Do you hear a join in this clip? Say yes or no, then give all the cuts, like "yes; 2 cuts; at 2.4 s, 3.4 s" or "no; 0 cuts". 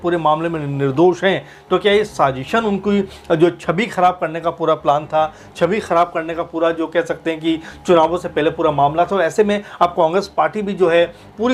no; 0 cuts